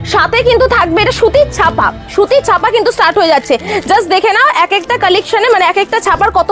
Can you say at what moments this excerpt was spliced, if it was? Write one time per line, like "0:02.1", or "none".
none